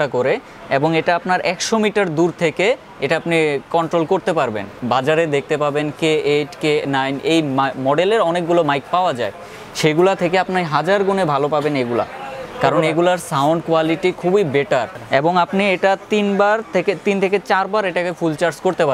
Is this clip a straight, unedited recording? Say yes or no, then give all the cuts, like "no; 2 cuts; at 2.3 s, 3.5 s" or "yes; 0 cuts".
no; 2 cuts; at 4.8 s, 14.9 s